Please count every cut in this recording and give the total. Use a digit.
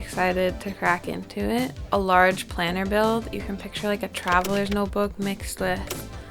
1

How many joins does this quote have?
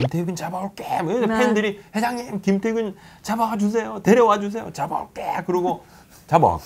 0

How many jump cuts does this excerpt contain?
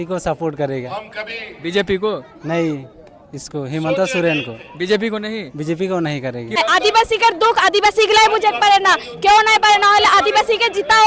1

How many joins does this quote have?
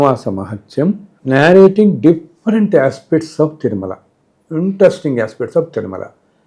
0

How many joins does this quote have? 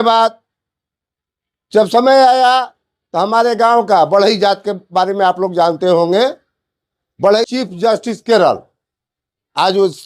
1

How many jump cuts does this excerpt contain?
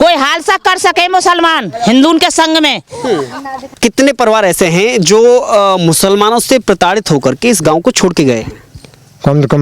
1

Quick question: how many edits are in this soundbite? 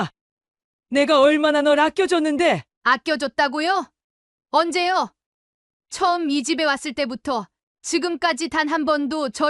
0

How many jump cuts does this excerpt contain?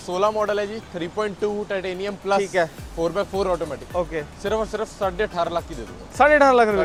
0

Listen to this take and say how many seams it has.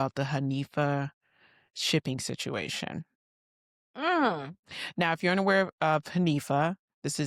0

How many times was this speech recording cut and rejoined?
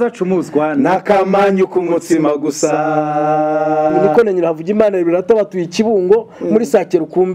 1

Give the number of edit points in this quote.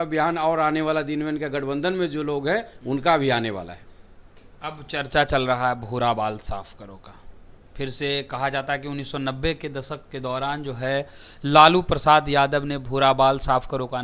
0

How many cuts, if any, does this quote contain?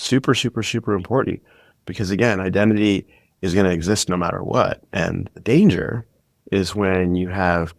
0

